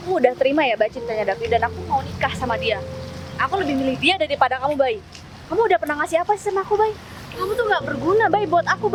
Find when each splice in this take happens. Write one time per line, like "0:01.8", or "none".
none

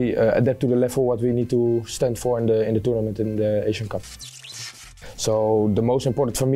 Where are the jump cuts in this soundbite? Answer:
0:04.7

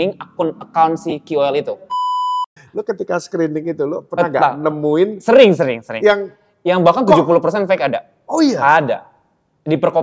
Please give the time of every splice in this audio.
0:02.2

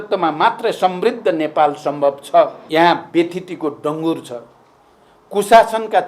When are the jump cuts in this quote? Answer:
0:02.6

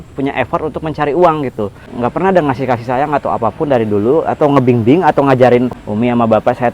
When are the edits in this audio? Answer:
0:01.9
0:05.8

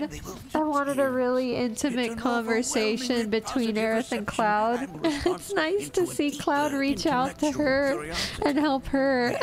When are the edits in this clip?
0:04.9

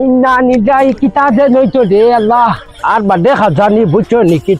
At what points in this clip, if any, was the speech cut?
none

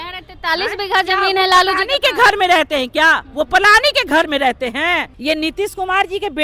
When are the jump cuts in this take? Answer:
0:05.1

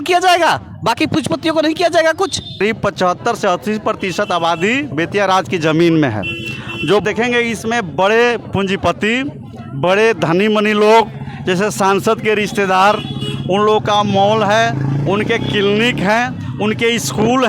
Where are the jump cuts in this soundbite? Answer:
0:02.6
0:07.0

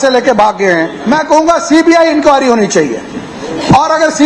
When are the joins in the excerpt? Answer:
0:01.0

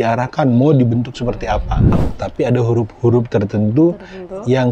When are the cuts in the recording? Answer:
0:02.1

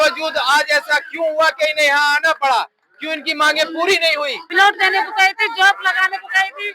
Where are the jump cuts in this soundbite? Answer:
0:04.4

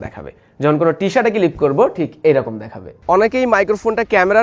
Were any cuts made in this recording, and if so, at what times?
0:02.9

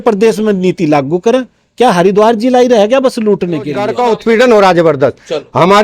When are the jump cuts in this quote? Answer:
0:03.8

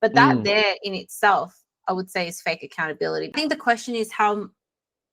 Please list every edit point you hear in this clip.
0:03.3

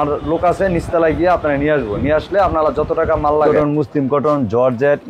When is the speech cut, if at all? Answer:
0:03.5

